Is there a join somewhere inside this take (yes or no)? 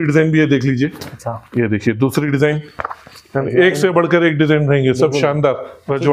no